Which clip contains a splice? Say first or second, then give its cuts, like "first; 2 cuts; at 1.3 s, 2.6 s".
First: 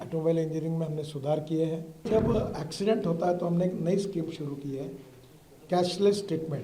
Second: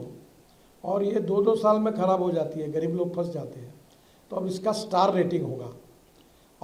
first; 1 cut; at 2.1 s